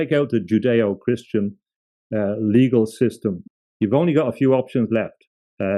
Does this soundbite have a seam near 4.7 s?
no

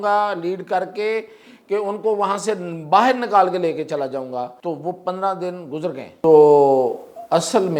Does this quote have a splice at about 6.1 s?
yes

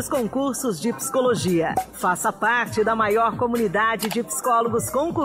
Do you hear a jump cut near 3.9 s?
no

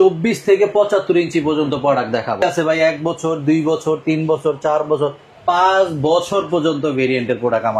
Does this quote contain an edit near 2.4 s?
yes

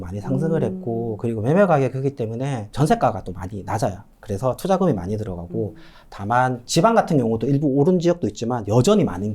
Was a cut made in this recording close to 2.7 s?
yes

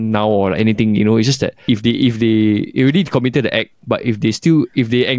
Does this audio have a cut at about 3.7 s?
no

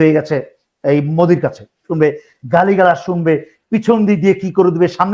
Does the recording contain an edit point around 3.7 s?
no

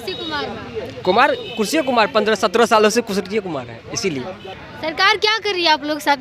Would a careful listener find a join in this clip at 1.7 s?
no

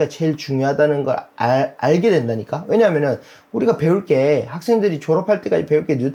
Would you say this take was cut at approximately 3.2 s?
no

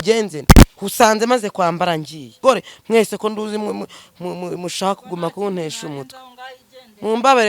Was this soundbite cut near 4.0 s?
no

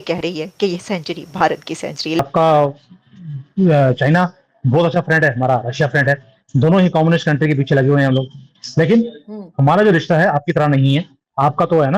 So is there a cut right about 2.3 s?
yes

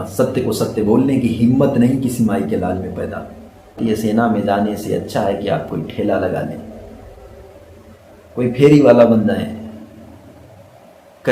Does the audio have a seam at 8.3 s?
no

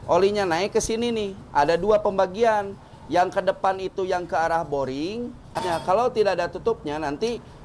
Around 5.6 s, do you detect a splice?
yes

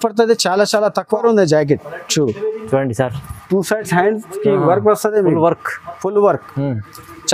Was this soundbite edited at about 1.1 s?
yes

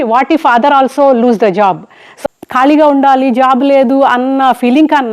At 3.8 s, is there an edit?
no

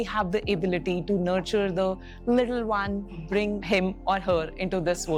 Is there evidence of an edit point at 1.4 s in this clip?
no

